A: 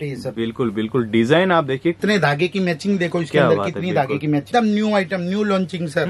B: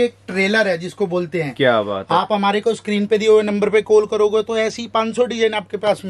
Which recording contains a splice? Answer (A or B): A